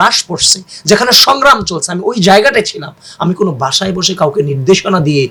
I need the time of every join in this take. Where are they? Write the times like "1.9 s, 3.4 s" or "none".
none